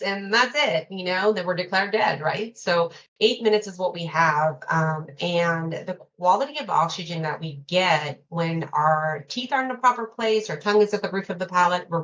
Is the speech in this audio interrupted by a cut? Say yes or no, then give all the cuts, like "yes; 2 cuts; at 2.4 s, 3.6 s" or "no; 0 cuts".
no; 0 cuts